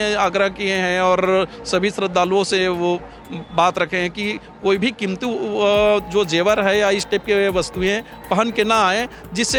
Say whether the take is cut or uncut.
uncut